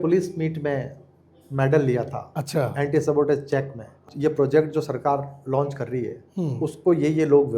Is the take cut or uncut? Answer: cut